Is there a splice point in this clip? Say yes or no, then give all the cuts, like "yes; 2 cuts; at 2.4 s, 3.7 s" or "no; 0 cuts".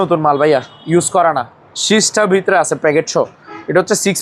no; 0 cuts